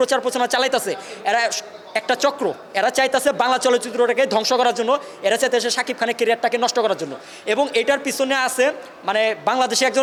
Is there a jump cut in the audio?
no; 0 cuts

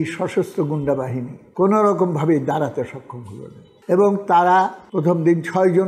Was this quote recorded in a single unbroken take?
yes; 0 cuts

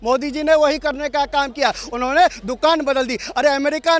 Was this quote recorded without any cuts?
yes; 0 cuts

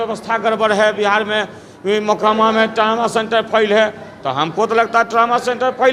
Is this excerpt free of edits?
yes; 0 cuts

